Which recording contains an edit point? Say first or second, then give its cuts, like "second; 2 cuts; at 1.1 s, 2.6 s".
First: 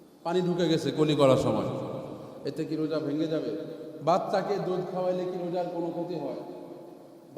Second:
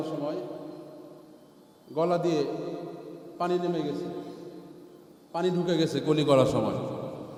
first; 1 cut; at 3.8 s